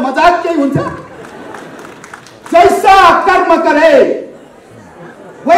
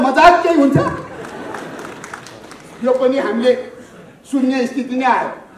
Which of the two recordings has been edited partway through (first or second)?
first